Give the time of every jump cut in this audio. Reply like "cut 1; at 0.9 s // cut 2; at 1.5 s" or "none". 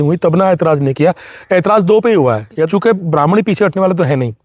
cut 1; at 2.7 s